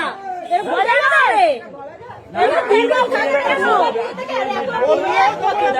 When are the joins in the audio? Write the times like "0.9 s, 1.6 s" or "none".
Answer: 2.8 s